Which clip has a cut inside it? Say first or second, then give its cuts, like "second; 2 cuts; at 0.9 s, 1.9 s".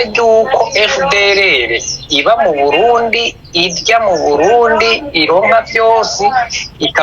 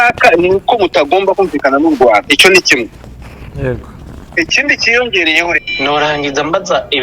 second; 1 cut; at 5.6 s